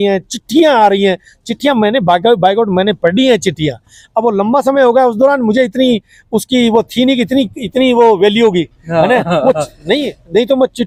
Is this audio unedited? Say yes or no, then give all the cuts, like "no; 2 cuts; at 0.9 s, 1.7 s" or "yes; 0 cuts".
yes; 0 cuts